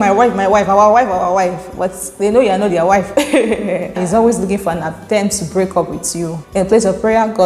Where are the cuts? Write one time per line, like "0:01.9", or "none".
0:03.9
0:06.4